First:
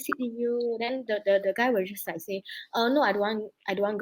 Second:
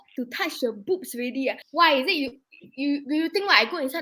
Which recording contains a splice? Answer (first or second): second